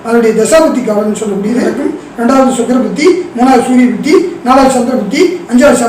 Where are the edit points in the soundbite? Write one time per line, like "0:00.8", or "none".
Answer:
0:01.7